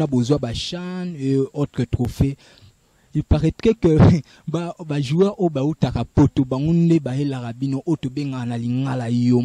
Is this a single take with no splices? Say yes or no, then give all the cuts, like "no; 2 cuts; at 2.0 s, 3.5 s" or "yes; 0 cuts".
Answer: yes; 0 cuts